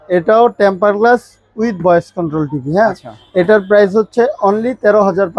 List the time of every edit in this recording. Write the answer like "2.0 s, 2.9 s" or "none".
none